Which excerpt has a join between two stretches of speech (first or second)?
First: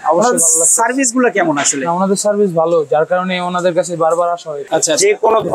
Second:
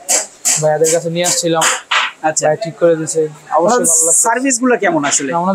first